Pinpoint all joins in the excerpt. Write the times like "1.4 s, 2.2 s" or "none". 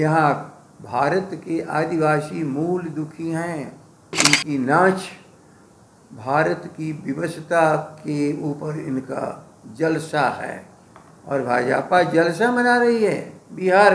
4.2 s